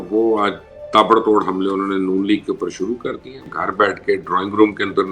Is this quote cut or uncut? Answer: cut